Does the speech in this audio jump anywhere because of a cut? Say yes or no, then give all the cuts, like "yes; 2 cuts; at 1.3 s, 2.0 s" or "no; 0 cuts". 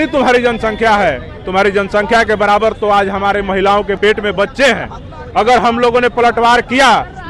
yes; 1 cut; at 3.9 s